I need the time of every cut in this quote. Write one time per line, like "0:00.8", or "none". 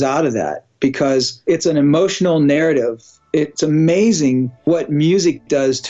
0:01.5
0:04.6